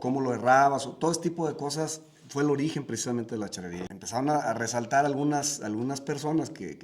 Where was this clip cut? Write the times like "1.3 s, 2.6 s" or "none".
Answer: 3.9 s